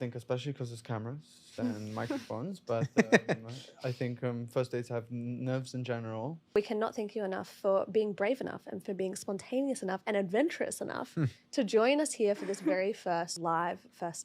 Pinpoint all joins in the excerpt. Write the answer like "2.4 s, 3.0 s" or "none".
6.6 s, 13.3 s